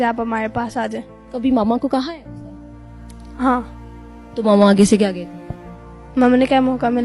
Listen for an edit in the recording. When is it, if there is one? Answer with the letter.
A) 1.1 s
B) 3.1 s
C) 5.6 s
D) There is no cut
A